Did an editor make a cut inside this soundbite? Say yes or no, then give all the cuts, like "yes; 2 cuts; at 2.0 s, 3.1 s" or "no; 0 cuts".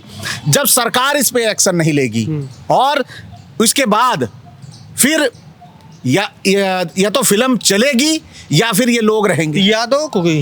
no; 0 cuts